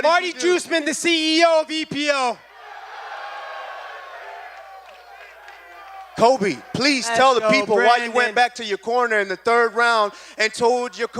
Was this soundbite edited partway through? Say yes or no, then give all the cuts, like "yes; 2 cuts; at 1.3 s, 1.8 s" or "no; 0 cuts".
no; 0 cuts